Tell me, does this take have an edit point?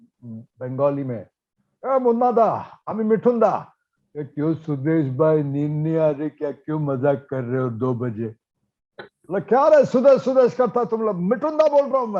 no; 0 cuts

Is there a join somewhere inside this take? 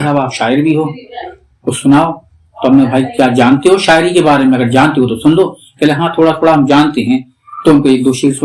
no; 0 cuts

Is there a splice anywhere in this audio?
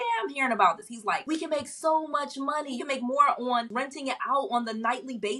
yes; 3 cuts; at 1.2 s, 2.8 s, 3.7 s

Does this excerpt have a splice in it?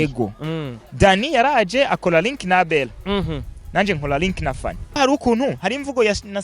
yes; 1 cut; at 4.8 s

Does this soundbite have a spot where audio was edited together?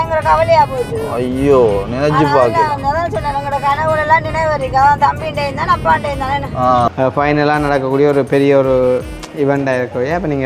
yes; 1 cut; at 6.9 s

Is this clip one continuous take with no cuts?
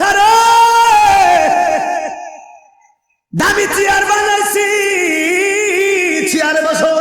yes; 0 cuts

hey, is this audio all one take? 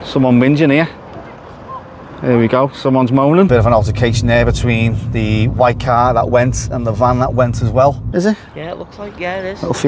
no; 2 cuts; at 3.5 s, 8.0 s

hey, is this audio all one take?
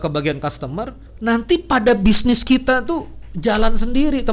no; 1 cut; at 1.0 s

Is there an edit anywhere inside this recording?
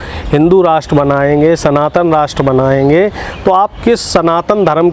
no; 0 cuts

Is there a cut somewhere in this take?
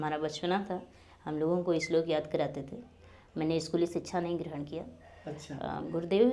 no; 0 cuts

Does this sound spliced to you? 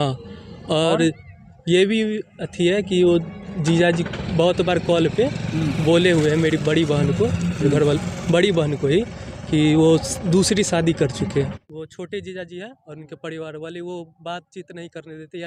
yes; 1 cut; at 11.6 s

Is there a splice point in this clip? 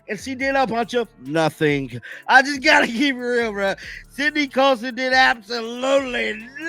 no; 0 cuts

